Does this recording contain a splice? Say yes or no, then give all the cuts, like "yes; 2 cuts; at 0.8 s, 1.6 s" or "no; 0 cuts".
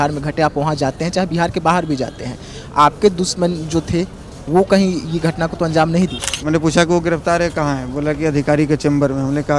yes; 1 cut; at 6.3 s